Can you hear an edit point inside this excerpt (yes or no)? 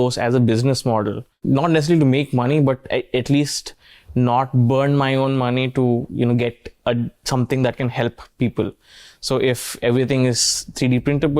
yes